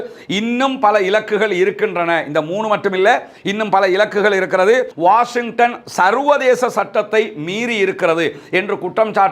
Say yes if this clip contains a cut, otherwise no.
yes